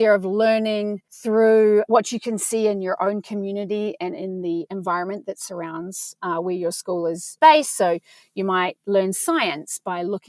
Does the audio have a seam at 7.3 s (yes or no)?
yes